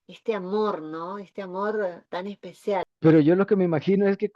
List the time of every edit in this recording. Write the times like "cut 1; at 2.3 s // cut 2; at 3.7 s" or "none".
cut 1; at 2.9 s